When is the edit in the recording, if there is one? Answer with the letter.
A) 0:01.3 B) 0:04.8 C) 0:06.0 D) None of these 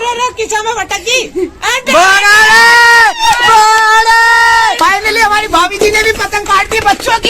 B